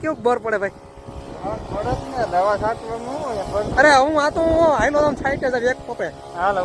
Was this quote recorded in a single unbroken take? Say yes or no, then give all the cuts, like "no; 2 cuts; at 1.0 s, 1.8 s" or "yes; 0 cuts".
yes; 0 cuts